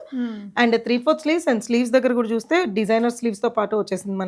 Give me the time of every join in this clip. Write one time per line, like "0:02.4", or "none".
none